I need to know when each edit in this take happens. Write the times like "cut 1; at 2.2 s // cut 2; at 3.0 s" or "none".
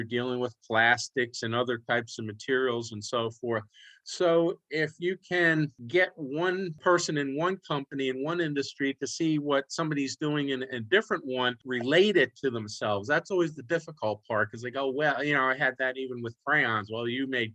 cut 1; at 5.8 s // cut 2; at 6.8 s // cut 3; at 11.6 s